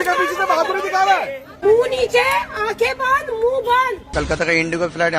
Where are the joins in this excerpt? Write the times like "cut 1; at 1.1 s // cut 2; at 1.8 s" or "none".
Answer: cut 1; at 1.6 s // cut 2; at 4.0 s